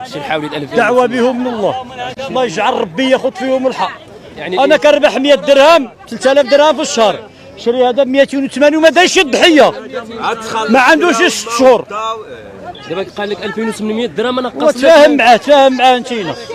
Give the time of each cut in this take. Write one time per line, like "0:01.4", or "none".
none